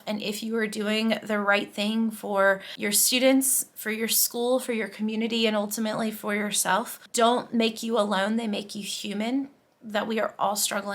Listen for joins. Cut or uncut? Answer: cut